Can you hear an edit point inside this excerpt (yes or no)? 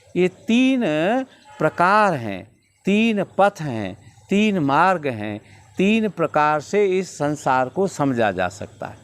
no